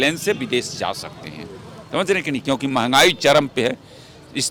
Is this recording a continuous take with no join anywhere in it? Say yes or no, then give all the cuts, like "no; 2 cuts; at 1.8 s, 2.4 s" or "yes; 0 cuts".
yes; 0 cuts